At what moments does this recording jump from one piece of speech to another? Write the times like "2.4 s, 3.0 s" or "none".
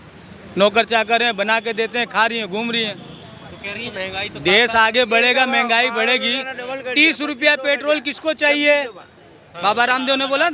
3.9 s